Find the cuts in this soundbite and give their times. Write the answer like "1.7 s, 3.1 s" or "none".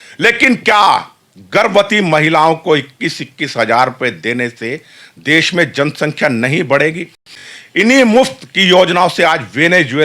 7.4 s